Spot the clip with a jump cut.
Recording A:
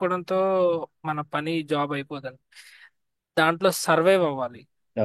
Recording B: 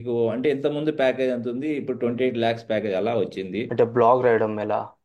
B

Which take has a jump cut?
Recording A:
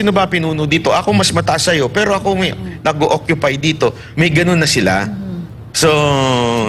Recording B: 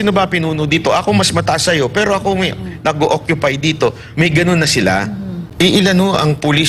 B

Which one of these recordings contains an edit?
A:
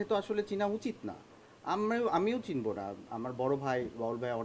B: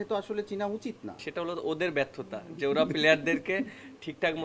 B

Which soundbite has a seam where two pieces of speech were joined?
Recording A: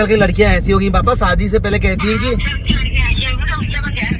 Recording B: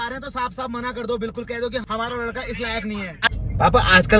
B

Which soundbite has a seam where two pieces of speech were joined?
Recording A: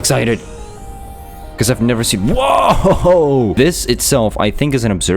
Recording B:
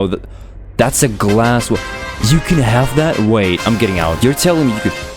A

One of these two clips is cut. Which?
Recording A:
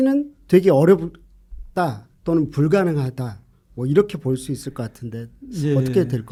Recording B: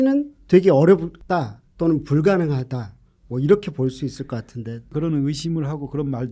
B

